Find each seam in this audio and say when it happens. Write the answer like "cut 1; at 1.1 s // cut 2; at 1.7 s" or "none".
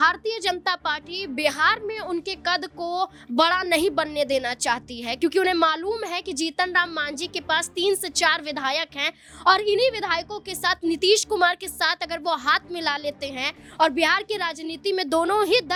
none